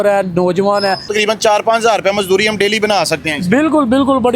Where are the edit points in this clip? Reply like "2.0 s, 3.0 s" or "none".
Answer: 1.1 s